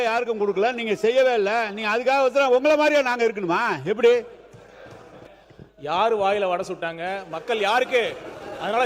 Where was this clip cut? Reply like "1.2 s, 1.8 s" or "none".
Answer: 5.5 s